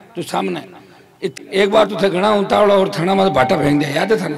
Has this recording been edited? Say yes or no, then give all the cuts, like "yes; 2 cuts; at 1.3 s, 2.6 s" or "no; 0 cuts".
yes; 1 cut; at 1.3 s